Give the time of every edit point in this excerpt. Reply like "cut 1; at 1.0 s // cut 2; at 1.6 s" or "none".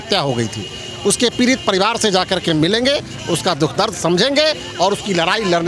none